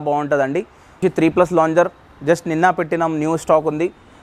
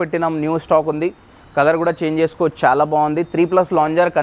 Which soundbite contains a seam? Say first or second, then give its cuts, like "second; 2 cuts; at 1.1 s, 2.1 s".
first; 1 cut; at 1.0 s